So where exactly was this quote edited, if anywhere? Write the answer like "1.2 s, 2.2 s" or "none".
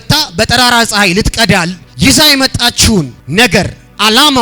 1.8 s, 3.2 s